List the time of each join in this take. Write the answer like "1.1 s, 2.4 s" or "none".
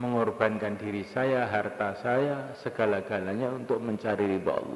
none